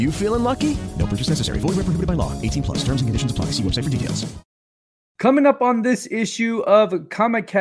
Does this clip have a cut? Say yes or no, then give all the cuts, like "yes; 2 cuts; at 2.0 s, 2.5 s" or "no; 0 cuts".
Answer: yes; 1 cut; at 4.7 s